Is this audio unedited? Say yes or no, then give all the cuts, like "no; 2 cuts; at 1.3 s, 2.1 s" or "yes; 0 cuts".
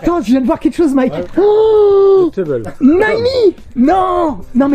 no; 1 cut; at 1.3 s